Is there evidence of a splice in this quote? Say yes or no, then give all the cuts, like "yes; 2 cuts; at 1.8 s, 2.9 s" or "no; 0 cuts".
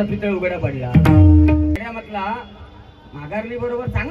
yes; 1 cut; at 1.8 s